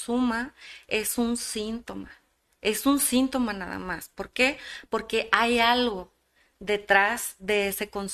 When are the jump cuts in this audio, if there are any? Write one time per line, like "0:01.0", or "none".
none